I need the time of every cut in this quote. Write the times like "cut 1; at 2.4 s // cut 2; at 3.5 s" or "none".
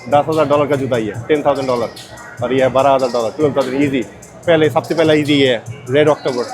none